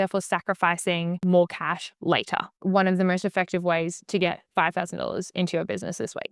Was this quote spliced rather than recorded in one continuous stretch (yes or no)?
yes